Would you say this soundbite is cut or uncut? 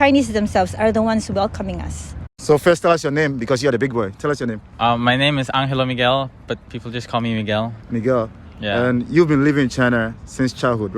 uncut